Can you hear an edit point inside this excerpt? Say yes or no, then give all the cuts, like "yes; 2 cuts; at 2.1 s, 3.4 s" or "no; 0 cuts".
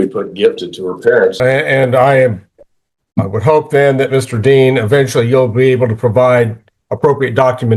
yes; 1 cut; at 1.4 s